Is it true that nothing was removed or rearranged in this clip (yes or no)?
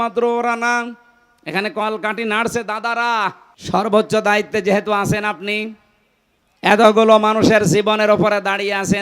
no